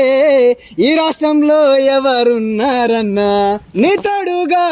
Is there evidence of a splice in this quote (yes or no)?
yes